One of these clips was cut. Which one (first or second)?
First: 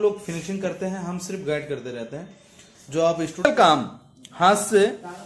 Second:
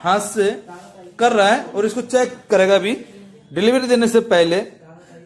first